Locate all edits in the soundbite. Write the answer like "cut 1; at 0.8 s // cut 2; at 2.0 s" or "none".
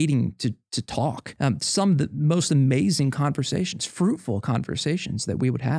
cut 1; at 1.3 s